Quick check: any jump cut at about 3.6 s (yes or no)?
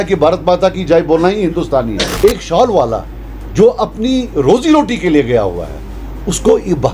no